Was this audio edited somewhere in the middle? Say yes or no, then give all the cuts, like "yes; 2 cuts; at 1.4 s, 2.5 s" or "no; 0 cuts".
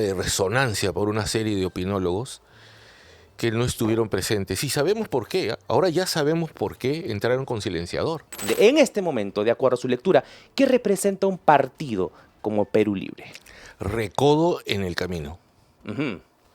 yes; 1 cut; at 8.4 s